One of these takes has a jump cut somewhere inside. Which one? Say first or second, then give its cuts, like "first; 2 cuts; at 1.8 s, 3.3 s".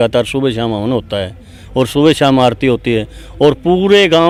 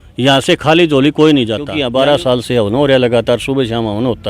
second; 1 cut; at 1.7 s